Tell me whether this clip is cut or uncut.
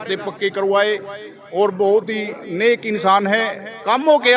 uncut